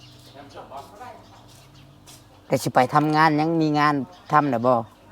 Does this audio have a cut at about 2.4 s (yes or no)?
yes